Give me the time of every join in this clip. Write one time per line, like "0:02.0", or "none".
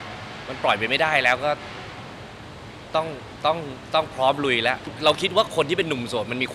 0:04.9